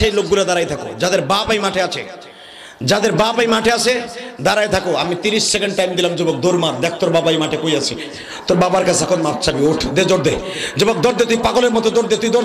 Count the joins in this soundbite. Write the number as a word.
zero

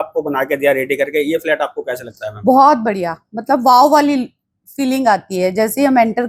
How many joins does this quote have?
zero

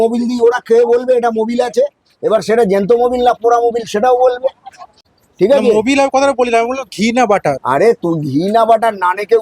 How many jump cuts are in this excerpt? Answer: zero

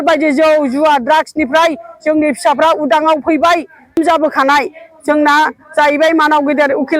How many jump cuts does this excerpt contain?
one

